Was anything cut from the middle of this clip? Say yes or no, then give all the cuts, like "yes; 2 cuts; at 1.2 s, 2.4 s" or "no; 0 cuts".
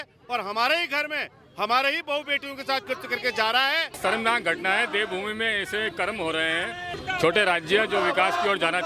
yes; 2 cuts; at 4.0 s, 7.0 s